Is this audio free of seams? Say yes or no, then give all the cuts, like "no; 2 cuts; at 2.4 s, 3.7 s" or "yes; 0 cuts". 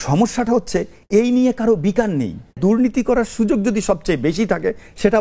no; 1 cut; at 2.6 s